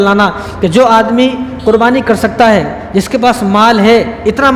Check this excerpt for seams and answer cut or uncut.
uncut